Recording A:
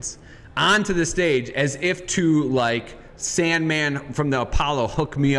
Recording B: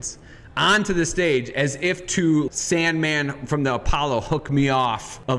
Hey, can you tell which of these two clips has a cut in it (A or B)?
B